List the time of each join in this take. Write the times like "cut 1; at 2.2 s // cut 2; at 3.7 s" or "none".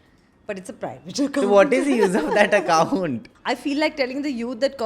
cut 1; at 3.3 s